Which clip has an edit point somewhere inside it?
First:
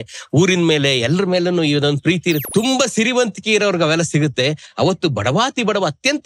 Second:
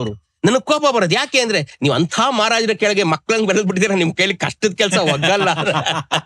first; 1 cut; at 2.4 s

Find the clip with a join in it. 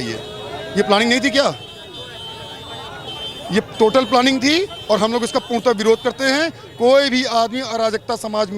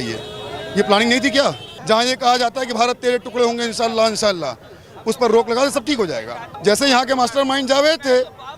second; 2 cuts; at 1.7 s, 6.4 s

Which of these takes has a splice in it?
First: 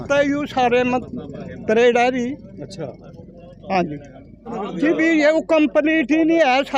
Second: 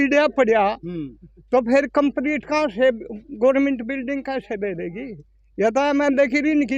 first; 1 cut; at 4.5 s

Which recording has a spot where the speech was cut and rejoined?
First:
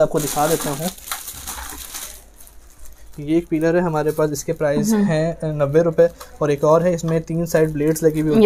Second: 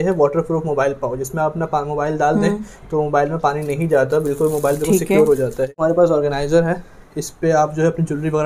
second; 1 cut; at 5.7 s

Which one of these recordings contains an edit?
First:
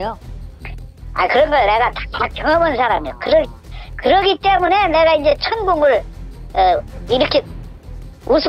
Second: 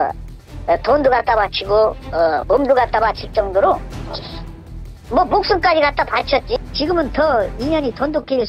second; 1 cut; at 6.6 s

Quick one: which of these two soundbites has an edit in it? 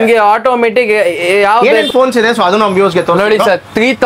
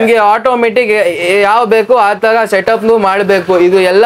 first; 1 cut; at 1.6 s

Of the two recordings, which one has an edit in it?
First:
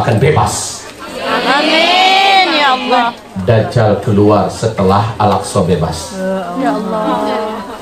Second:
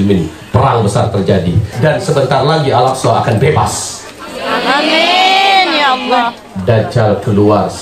second; 1 cut; at 1.7 s

